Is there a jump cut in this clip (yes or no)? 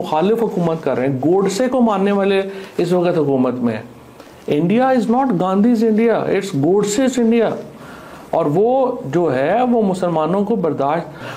no